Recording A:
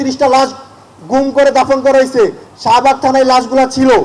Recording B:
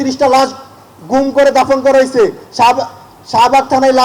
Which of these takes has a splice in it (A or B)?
A